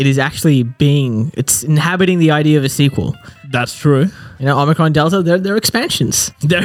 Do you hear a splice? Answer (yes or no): no